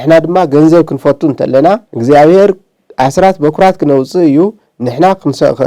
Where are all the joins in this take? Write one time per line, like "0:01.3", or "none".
0:01.9